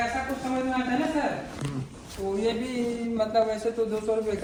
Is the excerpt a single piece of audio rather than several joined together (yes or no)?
yes